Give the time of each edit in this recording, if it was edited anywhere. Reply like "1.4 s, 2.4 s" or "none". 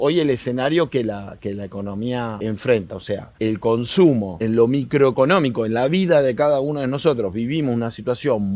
2.4 s, 3.3 s, 4.4 s